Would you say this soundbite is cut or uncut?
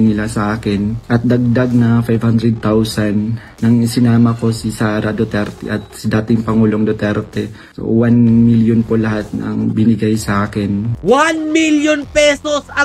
uncut